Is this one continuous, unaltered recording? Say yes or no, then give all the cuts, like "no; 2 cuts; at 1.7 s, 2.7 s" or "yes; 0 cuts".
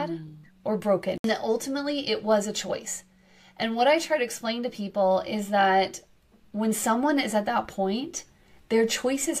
no; 1 cut; at 1.2 s